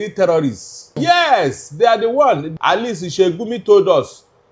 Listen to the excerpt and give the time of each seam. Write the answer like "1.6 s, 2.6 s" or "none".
1.0 s, 2.5 s